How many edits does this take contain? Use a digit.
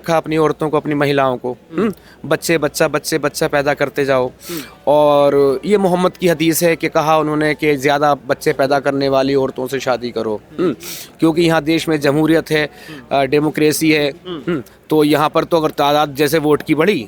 0